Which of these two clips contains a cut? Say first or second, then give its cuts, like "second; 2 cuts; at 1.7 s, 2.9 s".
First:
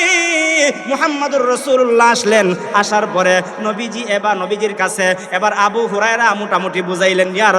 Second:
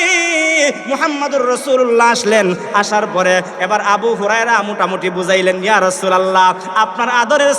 second; 1 cut; at 3.5 s